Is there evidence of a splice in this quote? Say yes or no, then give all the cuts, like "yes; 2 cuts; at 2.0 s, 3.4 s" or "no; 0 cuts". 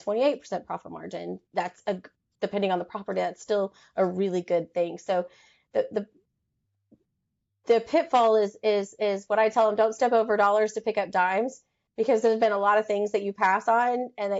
no; 0 cuts